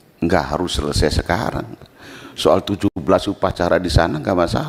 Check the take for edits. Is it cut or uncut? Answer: uncut